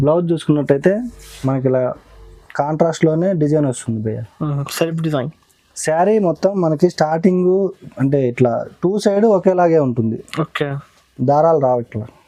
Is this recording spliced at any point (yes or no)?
no